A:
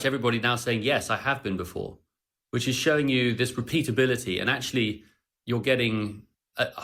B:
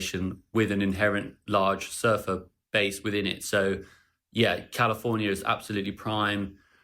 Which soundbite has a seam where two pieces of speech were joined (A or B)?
B